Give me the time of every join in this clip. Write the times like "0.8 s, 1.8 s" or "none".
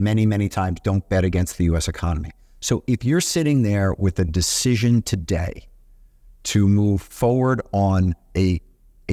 none